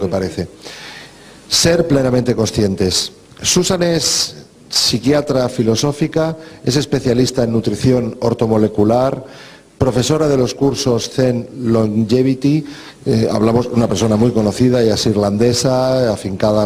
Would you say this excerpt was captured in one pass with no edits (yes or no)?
yes